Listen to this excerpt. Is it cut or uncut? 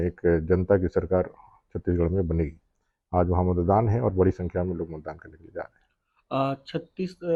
uncut